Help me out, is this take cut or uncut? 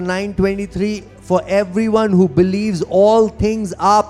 uncut